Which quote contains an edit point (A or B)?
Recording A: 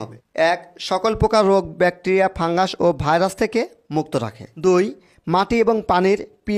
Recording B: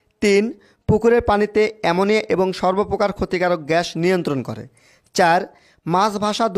A